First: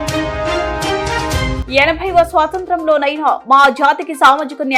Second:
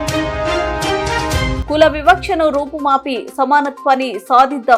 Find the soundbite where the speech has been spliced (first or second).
second